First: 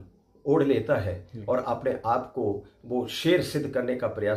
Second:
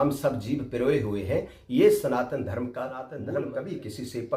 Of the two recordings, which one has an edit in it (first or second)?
second